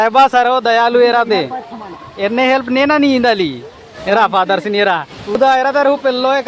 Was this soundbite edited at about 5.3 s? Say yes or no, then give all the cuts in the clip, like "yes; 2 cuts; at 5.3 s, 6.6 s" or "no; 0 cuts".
yes; 1 cut; at 5.3 s